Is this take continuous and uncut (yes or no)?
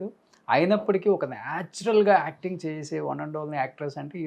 yes